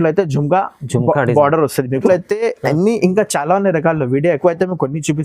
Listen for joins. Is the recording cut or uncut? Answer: cut